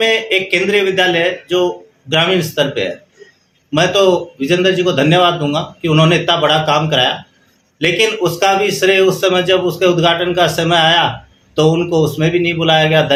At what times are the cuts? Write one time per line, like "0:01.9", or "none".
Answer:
none